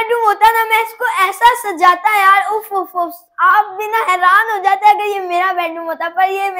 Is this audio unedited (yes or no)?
yes